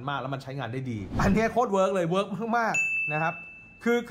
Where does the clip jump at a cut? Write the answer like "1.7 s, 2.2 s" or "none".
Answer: 1.0 s